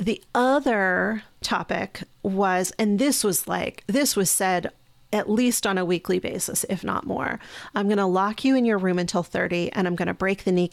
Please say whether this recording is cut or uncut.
cut